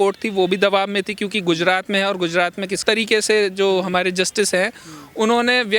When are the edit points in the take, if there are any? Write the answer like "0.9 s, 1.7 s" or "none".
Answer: 2.8 s